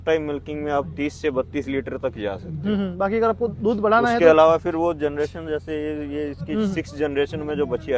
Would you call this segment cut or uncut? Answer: uncut